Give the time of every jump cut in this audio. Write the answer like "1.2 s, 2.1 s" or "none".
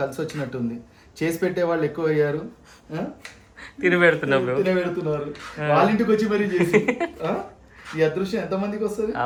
none